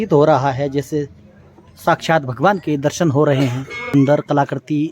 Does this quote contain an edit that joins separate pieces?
yes; 1 cut; at 3.8 s

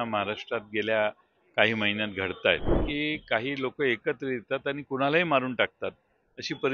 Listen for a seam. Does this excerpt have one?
yes; 1 cut; at 2.8 s

